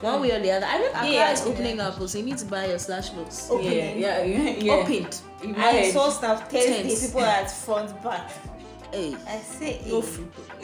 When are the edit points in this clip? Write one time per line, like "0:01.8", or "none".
0:00.9